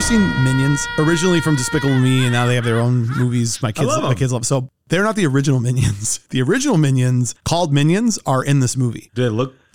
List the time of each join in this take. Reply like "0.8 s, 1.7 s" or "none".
0.9 s